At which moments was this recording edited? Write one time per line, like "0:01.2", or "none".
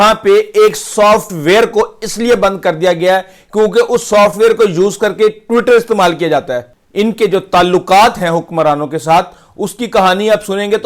0:06.8